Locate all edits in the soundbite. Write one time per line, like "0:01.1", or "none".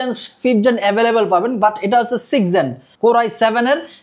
0:02.8

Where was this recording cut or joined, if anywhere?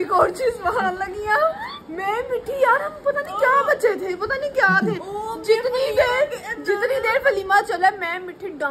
none

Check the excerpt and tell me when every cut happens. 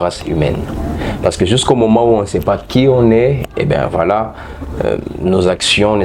none

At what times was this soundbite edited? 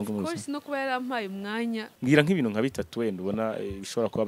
0:01.9

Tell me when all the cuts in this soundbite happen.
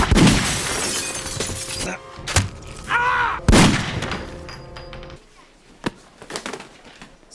0:05.1

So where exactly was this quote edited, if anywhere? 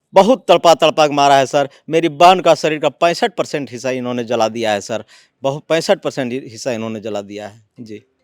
none

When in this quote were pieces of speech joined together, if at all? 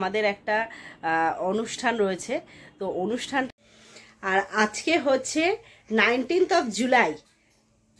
0:03.5

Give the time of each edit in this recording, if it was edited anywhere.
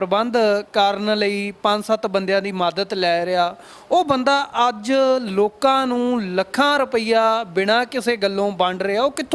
none

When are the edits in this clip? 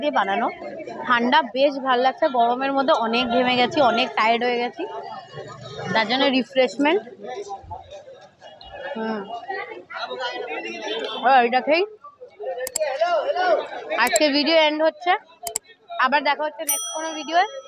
none

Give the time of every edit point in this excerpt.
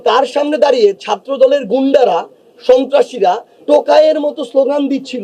0:03.5

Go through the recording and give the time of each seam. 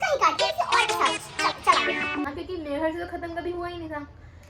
0:02.3

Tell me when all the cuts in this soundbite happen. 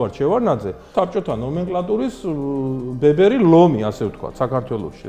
0:00.9

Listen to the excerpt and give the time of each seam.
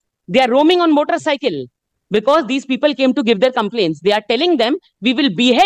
none

